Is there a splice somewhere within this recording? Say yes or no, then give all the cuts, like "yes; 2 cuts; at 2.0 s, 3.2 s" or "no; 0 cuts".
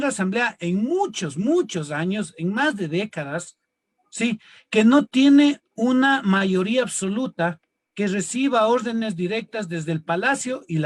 no; 0 cuts